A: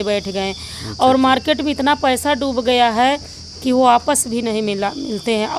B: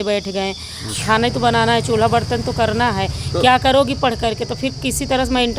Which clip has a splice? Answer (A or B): B